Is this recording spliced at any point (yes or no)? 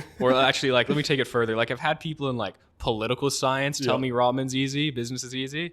no